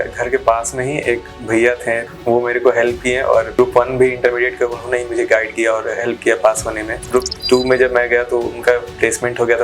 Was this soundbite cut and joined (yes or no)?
yes